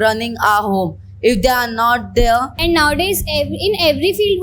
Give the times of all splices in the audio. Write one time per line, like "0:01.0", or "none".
0:02.5